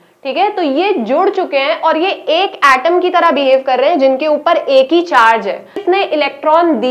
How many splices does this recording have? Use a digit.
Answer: 1